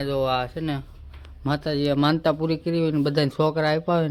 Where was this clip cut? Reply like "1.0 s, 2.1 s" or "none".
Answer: none